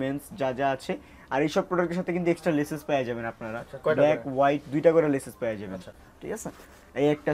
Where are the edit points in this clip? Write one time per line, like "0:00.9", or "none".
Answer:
none